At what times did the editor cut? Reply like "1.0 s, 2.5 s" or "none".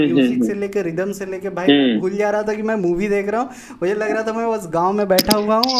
none